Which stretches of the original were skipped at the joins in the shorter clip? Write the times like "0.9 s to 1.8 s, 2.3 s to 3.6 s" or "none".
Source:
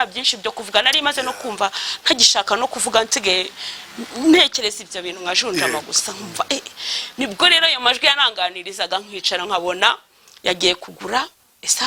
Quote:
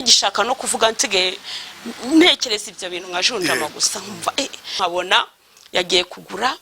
6.9 s to 9.4 s